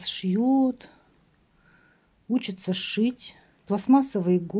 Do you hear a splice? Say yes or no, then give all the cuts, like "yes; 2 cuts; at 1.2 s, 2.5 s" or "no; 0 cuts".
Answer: no; 0 cuts